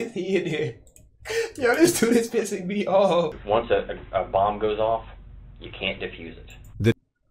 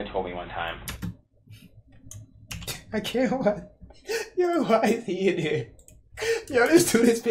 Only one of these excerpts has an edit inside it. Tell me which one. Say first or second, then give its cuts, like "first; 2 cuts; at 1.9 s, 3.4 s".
first; 1 cut; at 3.4 s